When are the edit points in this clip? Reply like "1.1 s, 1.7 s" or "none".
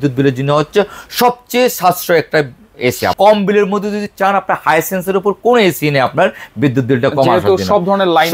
3.1 s

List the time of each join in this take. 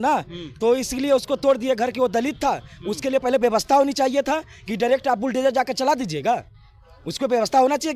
none

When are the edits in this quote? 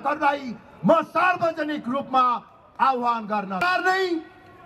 3.6 s

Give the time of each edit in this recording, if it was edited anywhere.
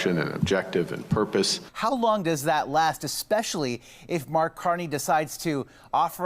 1.6 s

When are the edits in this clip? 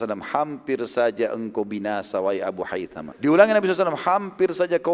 3.0 s

